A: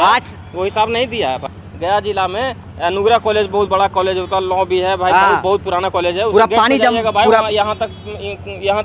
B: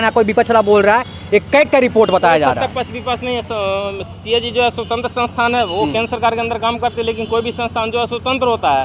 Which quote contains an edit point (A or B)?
A